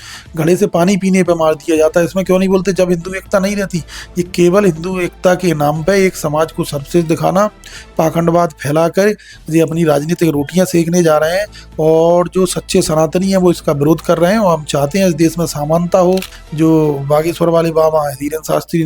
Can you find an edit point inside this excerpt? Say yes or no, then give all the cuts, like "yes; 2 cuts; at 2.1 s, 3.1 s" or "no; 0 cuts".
yes; 1 cut; at 16.4 s